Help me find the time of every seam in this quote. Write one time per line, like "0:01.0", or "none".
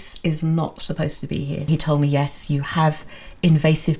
0:01.7